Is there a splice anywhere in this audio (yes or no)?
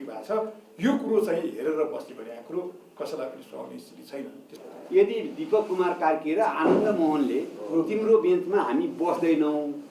yes